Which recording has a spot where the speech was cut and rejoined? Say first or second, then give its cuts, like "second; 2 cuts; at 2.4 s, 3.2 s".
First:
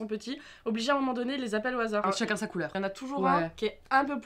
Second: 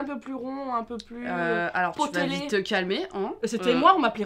first; 1 cut; at 2.0 s